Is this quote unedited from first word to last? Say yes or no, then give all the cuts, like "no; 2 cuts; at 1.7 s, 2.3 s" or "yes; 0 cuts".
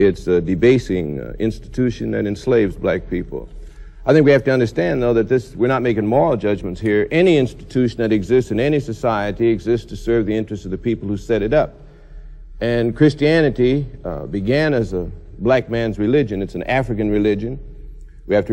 yes; 0 cuts